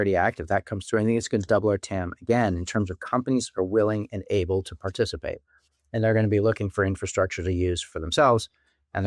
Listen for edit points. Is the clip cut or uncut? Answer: uncut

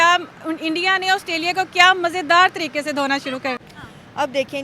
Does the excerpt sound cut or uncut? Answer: cut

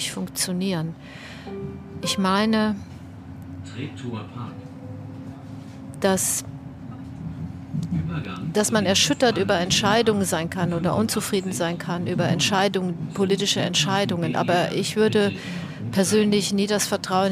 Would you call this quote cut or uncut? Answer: uncut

